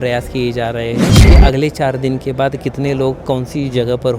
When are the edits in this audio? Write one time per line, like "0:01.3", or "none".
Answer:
0:01.2

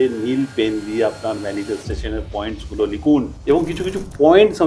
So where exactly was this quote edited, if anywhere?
0:03.3

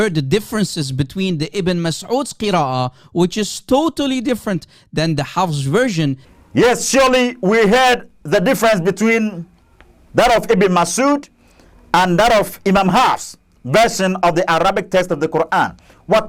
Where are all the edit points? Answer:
none

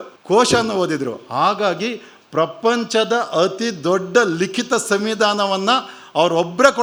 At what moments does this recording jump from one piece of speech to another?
none

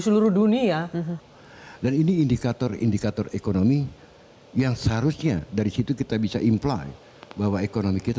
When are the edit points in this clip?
0:01.2

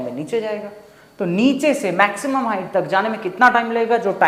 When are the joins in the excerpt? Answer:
none

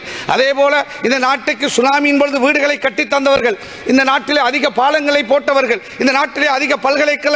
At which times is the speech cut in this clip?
none

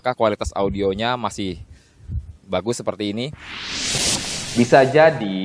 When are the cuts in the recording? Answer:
0:03.8

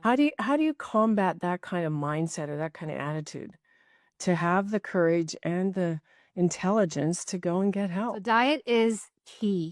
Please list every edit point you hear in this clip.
0:08.2

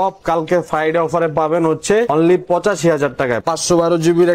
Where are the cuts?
0:02.1
0:03.4

